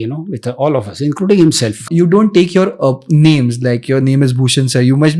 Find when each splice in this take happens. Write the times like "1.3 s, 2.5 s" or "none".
1.9 s